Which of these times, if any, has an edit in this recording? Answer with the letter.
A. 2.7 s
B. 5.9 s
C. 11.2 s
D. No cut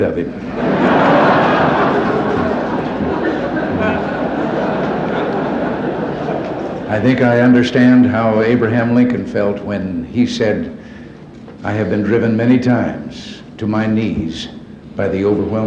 A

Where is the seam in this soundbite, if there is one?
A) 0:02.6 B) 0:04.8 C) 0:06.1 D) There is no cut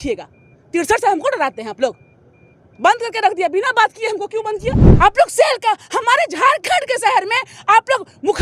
B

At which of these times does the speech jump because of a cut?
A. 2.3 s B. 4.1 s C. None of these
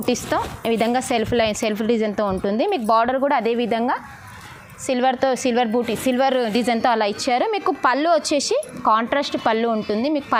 C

